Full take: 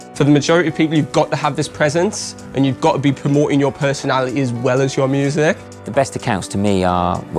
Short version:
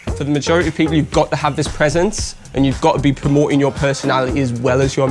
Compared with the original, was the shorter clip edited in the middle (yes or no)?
no